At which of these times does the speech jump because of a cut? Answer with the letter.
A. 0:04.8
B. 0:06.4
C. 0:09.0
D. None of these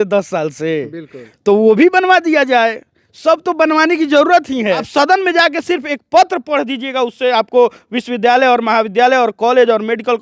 A